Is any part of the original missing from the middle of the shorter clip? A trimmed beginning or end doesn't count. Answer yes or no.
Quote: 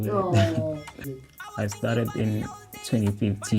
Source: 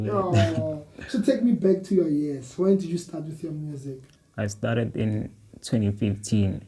yes